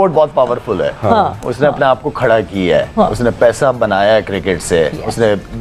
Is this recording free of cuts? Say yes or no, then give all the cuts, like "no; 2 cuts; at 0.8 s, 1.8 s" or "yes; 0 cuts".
yes; 0 cuts